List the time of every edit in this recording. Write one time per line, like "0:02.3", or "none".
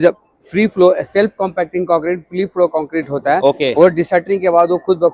none